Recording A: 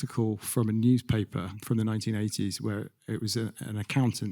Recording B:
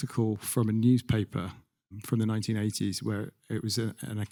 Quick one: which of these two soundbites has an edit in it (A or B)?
A